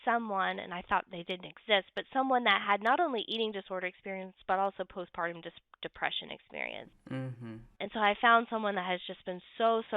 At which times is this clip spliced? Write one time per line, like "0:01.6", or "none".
0:07.7